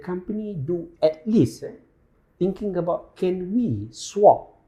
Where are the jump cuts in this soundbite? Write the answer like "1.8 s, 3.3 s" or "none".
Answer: none

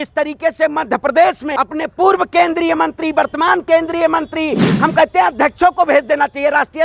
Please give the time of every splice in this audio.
1.4 s

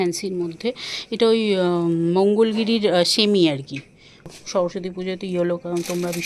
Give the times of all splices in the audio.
4.3 s

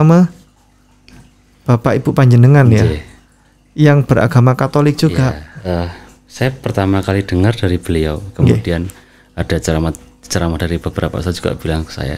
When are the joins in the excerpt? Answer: 5.5 s

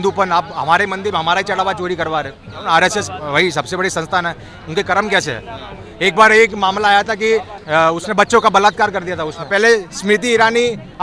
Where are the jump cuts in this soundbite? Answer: 2.6 s, 7.6 s, 9.5 s

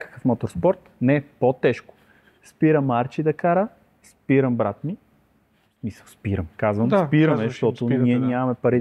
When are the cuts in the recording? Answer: none

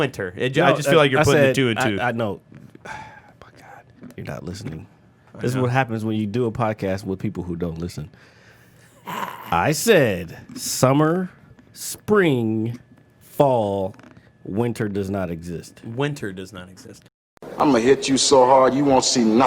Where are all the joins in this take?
17.2 s

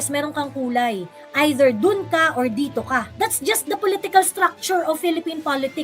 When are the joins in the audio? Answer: 3.1 s

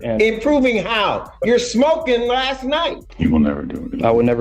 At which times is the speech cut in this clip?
3.0 s

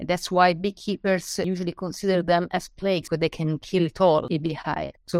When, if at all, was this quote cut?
1.5 s, 3.0 s, 4.3 s

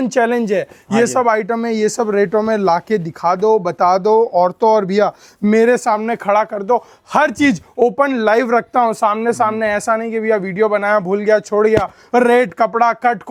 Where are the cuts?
none

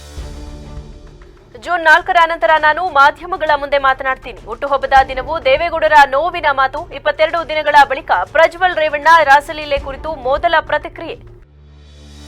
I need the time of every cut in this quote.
1.3 s

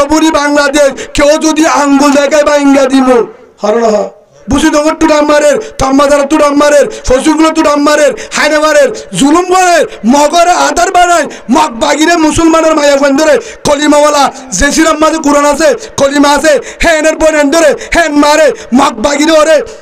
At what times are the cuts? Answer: 4.4 s

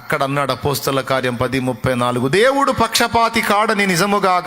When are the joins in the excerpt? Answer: none

